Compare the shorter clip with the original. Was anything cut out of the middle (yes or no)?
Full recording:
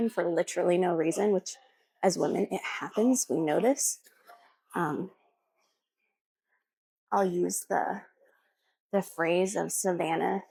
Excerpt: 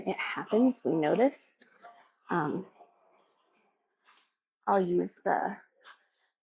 no